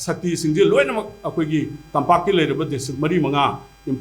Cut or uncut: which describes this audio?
uncut